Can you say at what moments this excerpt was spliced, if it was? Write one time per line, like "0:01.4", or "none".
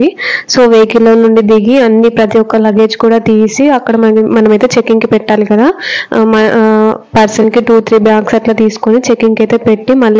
none

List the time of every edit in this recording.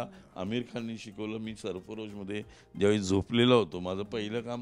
none

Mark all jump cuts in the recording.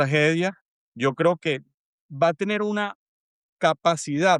none

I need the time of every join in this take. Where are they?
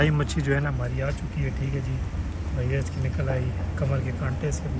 none

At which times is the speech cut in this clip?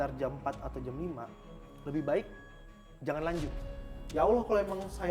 0:04.0

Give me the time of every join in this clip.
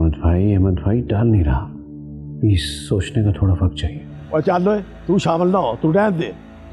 0:04.1

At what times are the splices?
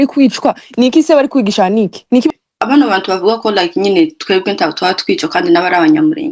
0:02.3

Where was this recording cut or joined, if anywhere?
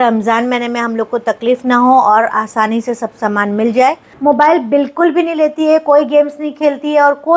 0:04.1

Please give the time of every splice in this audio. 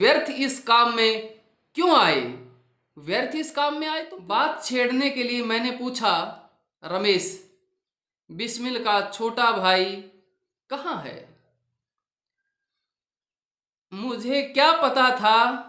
0:04.1

